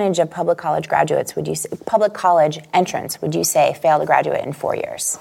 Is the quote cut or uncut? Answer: uncut